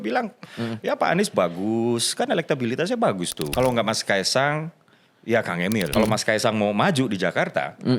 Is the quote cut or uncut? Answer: cut